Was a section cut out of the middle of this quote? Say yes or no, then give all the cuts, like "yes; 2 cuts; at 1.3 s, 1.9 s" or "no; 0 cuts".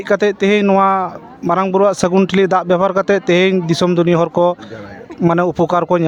no; 0 cuts